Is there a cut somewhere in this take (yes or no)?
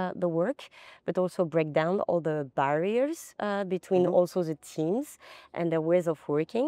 no